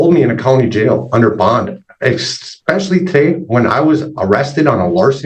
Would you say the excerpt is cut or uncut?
uncut